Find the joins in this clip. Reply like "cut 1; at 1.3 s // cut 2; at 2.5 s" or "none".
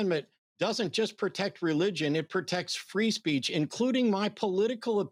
none